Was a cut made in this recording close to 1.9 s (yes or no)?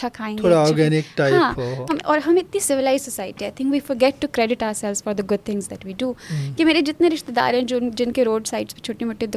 yes